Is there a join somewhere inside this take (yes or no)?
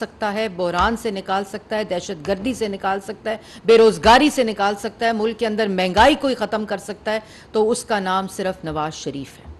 no